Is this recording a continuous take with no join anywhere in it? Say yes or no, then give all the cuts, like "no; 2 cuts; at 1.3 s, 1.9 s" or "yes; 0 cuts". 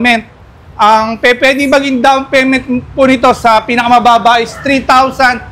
yes; 0 cuts